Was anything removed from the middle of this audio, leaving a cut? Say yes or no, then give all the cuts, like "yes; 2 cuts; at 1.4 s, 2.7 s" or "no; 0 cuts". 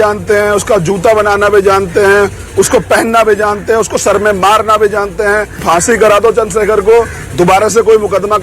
yes; 1 cut; at 5.6 s